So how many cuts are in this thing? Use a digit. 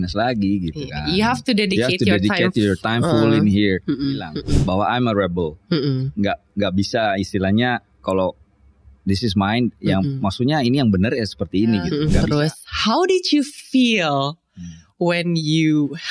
2